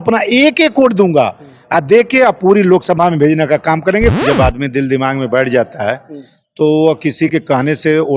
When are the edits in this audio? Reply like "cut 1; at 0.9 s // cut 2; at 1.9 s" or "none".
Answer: cut 1; at 4.2 s